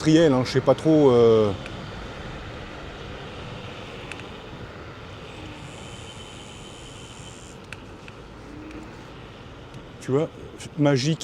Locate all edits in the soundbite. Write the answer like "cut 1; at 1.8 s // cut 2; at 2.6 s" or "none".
none